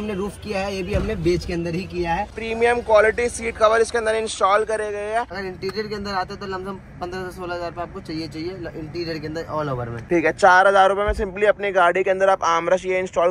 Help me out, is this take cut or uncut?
cut